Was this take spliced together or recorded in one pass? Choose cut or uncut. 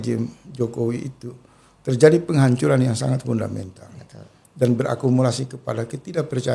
uncut